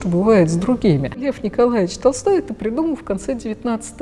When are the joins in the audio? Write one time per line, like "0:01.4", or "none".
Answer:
0:01.3